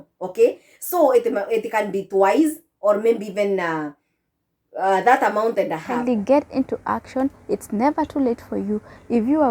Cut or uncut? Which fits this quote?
cut